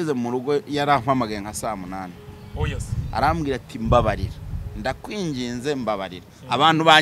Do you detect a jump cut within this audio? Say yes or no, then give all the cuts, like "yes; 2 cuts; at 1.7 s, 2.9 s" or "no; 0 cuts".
no; 0 cuts